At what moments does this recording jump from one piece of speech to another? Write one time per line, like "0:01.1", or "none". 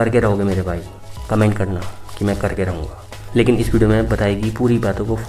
none